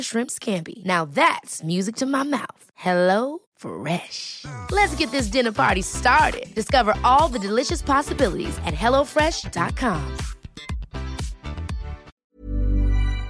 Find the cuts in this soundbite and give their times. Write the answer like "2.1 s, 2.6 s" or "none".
12.2 s